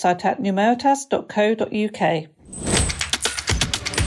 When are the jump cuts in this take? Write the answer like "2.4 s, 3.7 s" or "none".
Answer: 2.4 s